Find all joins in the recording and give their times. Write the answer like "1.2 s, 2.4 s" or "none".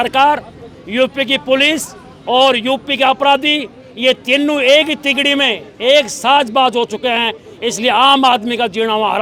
none